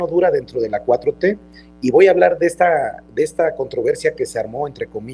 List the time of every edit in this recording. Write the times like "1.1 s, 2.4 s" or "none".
none